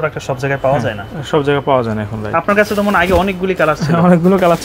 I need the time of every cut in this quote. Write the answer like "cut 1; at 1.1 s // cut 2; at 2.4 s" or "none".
none